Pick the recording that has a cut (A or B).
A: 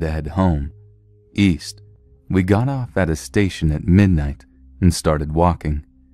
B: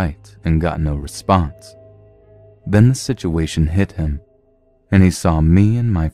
B